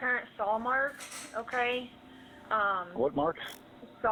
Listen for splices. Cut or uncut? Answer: uncut